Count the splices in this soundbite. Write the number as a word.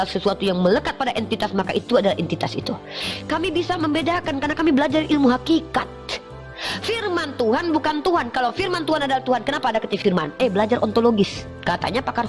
zero